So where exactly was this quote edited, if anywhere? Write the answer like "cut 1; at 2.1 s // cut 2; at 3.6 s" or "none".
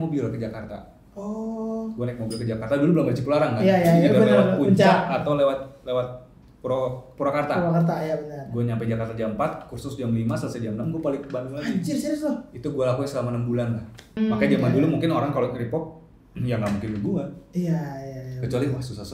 cut 1; at 14.2 s

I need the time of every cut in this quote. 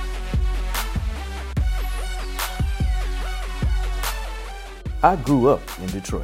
none

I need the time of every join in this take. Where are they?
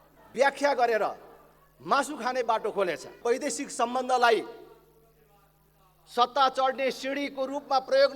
cut 1; at 3.1 s

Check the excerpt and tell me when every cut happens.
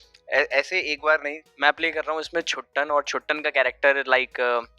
cut 1; at 1.4 s

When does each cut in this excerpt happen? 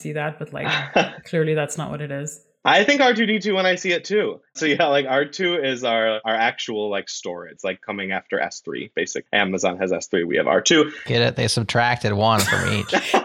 cut 1; at 6.2 s // cut 2; at 7.5 s // cut 3; at 9.2 s

